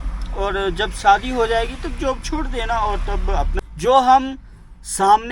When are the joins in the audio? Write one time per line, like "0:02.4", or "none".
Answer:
0:03.5